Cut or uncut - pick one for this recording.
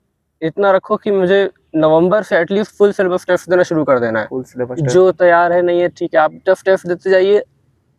uncut